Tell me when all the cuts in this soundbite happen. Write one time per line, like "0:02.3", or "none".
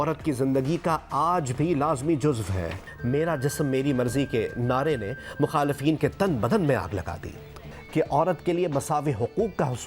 0:02.9
0:07.7